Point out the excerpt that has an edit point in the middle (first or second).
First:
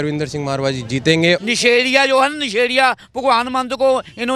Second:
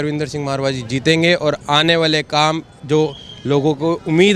first